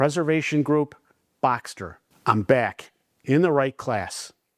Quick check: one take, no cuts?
no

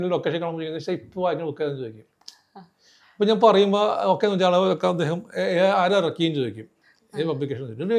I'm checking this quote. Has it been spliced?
no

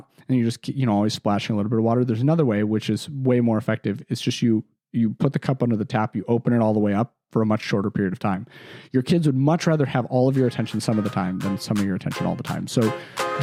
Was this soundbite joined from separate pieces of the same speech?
no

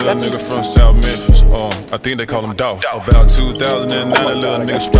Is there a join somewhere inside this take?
no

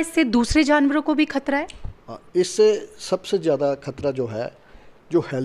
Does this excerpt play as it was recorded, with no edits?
yes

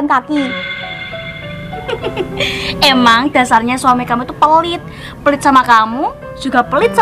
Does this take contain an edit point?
no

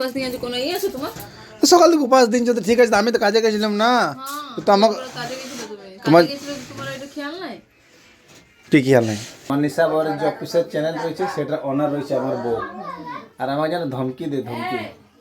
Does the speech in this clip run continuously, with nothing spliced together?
no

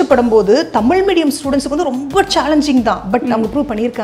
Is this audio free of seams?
yes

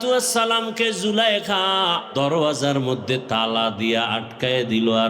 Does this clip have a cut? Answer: yes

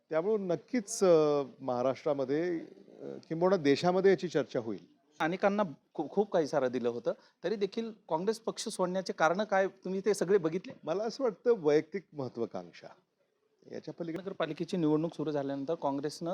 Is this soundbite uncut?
no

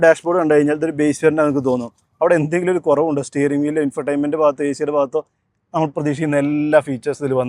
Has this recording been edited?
no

